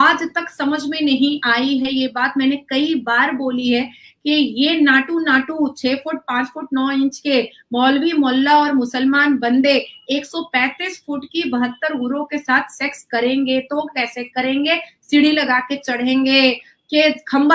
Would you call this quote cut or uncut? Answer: uncut